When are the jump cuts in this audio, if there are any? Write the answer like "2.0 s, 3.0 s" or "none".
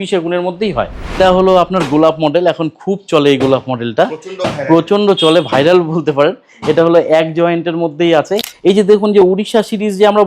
8.4 s